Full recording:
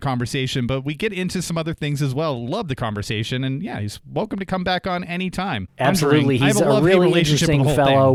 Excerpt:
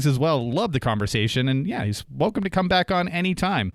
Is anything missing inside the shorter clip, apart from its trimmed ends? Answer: no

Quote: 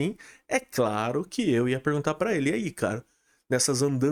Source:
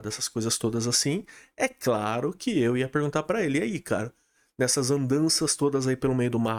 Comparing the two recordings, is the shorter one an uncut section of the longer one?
yes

